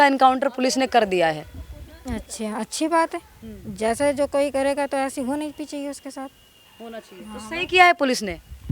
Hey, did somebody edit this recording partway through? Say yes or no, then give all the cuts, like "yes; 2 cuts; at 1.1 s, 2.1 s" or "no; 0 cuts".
no; 0 cuts